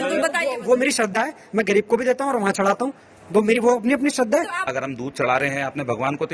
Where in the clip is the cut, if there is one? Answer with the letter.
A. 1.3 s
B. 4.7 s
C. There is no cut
B